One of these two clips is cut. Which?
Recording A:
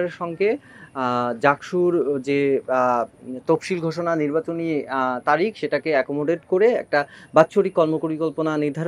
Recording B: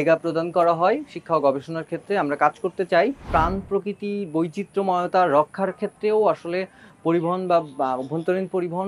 B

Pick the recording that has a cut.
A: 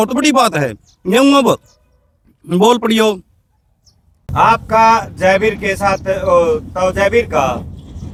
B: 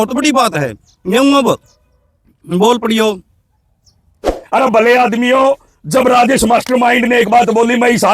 B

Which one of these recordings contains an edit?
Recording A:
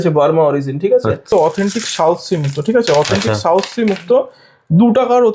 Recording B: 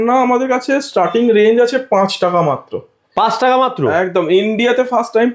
A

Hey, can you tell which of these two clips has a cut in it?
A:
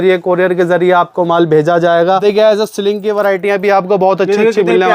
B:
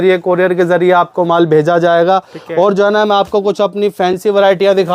A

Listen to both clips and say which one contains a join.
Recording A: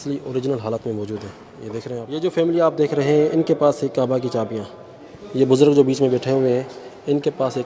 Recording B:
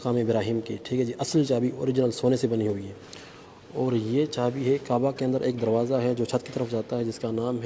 A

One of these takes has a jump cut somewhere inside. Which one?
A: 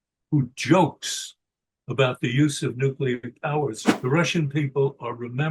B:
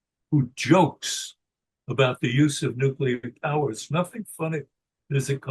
A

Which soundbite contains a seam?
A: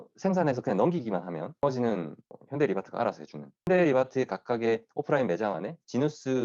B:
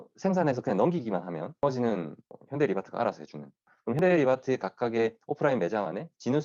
A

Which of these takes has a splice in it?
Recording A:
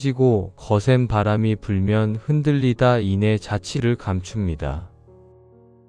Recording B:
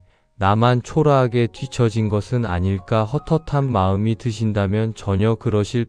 A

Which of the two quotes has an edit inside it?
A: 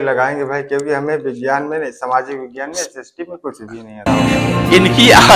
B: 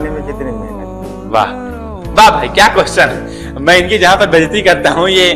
A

